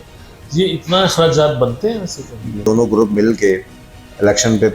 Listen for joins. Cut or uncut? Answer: cut